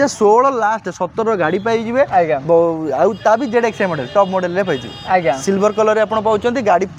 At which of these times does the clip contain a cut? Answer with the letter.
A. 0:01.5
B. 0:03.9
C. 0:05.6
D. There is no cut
D